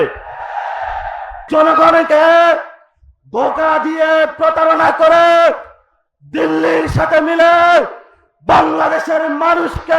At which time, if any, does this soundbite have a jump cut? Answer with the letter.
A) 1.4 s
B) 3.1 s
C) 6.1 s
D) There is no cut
A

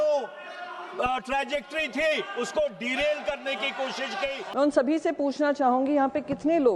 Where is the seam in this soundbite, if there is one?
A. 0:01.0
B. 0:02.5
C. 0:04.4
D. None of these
C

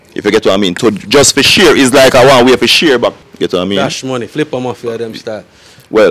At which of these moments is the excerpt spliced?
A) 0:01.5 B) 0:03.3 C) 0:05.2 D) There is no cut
B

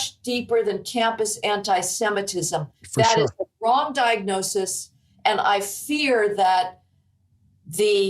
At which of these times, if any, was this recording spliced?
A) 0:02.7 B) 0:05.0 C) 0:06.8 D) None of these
D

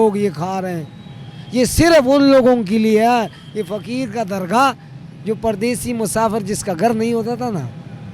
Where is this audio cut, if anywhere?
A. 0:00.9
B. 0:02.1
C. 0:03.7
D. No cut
D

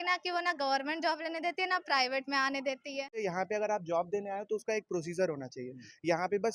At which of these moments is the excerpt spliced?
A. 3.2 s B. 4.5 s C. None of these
A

